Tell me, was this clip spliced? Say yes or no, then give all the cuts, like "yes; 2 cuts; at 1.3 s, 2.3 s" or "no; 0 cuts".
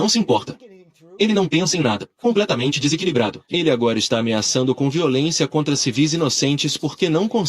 yes; 2 cuts; at 2.0 s, 3.4 s